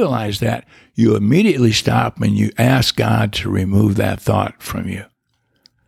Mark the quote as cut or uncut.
uncut